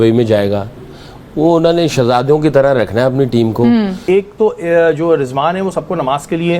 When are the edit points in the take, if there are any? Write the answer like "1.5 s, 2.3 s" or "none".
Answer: 4.0 s